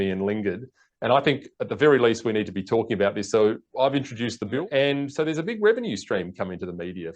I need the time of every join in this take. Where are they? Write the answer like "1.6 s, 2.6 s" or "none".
4.5 s